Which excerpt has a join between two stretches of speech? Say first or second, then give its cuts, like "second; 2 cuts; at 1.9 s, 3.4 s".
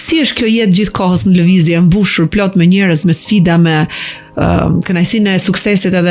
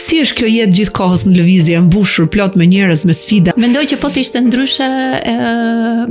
second; 1 cut; at 3.5 s